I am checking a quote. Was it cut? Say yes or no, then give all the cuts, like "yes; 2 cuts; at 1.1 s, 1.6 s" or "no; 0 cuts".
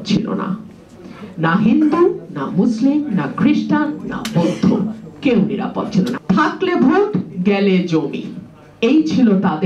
yes; 1 cut; at 6.2 s